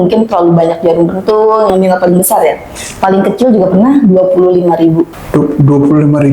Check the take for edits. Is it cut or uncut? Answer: cut